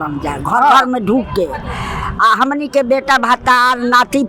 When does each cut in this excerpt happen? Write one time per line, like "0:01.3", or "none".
none